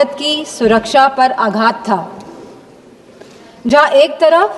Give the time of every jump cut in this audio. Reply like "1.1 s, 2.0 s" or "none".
none